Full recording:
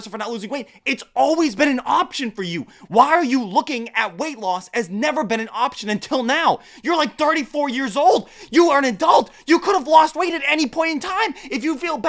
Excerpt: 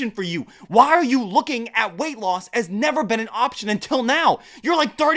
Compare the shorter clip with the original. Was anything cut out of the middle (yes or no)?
no